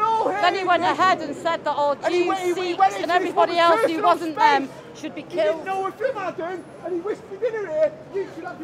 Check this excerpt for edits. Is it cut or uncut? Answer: uncut